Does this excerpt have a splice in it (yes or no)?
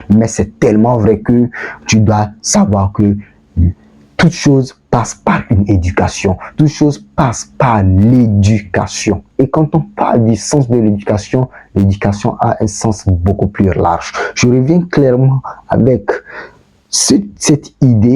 no